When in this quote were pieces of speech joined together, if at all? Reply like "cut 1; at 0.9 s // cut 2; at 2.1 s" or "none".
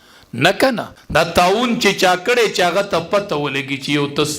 cut 1; at 0.9 s